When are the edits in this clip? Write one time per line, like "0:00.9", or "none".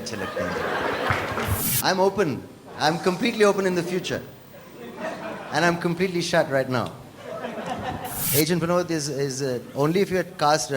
0:01.6
0:08.2